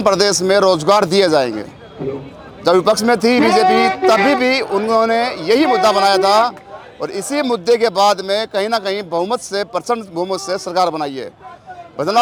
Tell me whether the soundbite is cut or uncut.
uncut